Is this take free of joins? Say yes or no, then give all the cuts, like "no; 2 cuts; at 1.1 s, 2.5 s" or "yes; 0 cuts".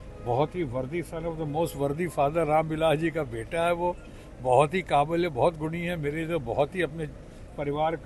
yes; 0 cuts